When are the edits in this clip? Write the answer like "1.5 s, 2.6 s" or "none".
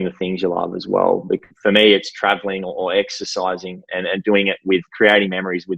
1.5 s